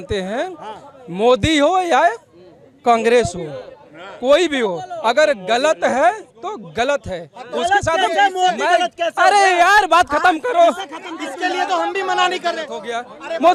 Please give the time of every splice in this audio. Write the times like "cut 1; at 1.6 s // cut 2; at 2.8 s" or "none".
none

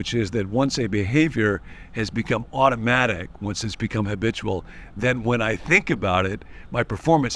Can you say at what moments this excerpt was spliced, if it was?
none

